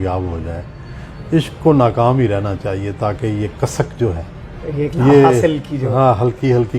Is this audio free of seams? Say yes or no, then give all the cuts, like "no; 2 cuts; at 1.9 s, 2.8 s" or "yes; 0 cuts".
yes; 0 cuts